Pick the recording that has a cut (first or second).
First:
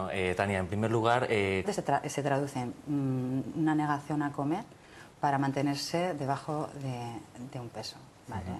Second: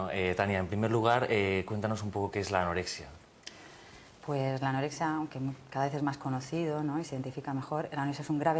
second